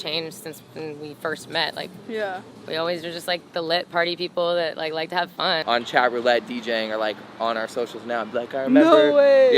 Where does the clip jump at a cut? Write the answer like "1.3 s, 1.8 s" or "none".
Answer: 5.6 s